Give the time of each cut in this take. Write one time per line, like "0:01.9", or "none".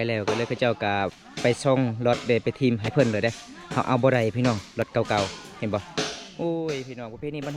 0:02.9